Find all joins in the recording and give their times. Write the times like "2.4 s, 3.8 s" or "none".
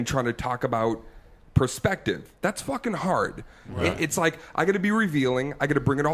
3.9 s